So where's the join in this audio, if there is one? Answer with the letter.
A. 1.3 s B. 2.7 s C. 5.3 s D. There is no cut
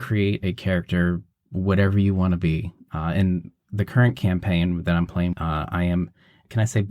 B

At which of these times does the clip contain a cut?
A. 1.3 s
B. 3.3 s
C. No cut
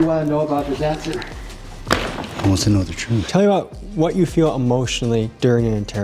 B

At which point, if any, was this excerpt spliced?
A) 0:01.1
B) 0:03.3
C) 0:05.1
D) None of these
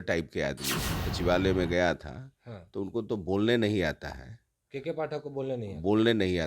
A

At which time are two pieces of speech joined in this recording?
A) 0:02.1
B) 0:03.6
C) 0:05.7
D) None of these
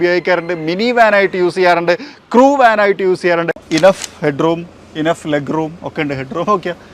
B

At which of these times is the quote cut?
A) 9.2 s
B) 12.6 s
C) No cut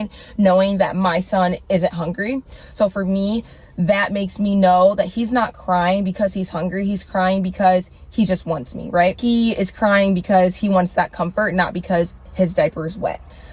A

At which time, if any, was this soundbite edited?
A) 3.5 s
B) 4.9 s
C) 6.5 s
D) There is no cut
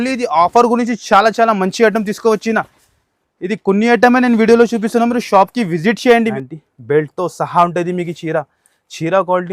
C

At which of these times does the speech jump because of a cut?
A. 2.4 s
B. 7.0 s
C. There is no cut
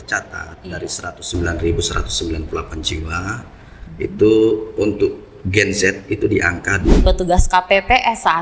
B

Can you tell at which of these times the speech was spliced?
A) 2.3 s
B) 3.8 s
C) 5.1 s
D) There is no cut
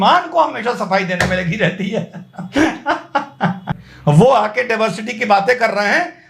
B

